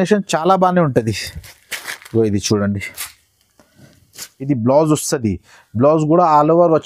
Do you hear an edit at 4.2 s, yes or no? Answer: yes